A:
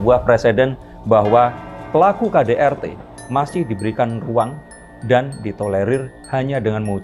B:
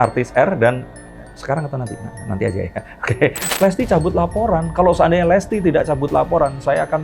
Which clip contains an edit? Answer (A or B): B